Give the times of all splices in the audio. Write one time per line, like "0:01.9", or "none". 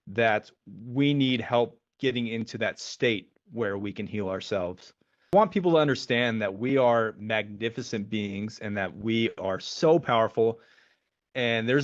0:05.3